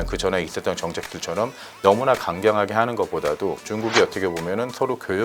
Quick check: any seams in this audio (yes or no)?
no